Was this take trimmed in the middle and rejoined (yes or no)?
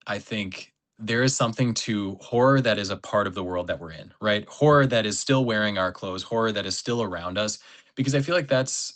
no